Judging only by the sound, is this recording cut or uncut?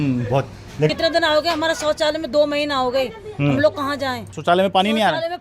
cut